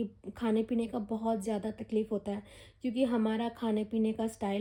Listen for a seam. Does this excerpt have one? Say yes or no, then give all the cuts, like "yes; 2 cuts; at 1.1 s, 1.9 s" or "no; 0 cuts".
no; 0 cuts